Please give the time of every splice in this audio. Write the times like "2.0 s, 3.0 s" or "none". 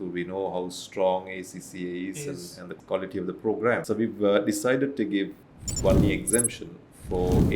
2.6 s, 3.8 s, 5.4 s